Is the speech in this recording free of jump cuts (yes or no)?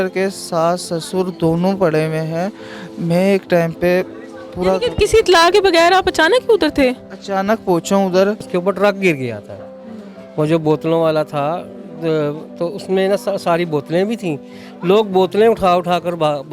no